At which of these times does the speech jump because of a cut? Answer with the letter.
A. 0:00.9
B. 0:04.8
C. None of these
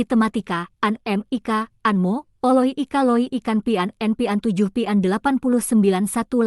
A